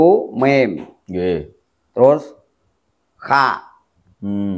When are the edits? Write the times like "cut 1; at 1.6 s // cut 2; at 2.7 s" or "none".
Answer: none

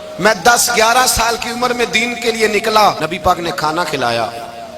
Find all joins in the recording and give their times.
cut 1; at 3.0 s

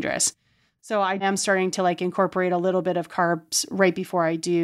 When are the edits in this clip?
cut 1; at 1.2 s

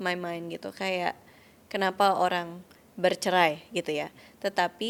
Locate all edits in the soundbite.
none

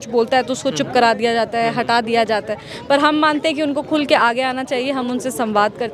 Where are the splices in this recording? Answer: none

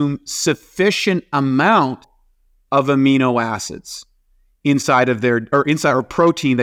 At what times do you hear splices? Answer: none

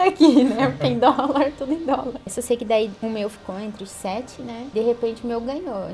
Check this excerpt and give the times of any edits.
cut 1; at 2.3 s // cut 2; at 2.9 s // cut 3; at 4.7 s

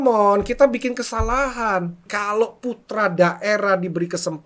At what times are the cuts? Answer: cut 1; at 2.1 s

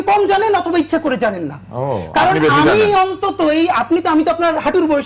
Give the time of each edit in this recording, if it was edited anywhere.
none

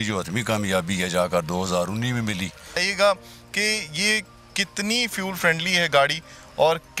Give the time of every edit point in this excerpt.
cut 1; at 2.9 s

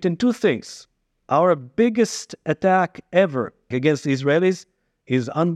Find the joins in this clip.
cut 1; at 3.7 s

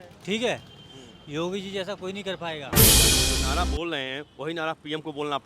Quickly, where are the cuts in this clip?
cut 1; at 2.6 s // cut 2; at 3.4 s

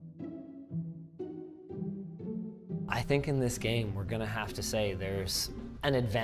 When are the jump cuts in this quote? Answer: cut 1; at 2.6 s

